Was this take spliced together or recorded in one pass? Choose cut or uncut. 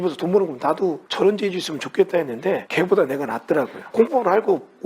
cut